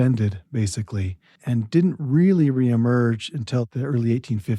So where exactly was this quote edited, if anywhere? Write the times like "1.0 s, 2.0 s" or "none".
3.7 s